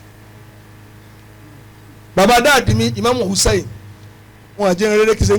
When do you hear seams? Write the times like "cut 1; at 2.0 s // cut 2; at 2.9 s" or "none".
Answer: cut 1; at 1.8 s